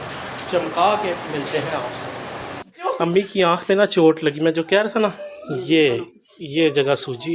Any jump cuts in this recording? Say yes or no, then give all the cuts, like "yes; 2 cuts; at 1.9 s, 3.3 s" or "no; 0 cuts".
yes; 1 cut; at 2.6 s